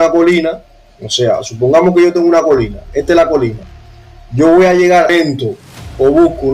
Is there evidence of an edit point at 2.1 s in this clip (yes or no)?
no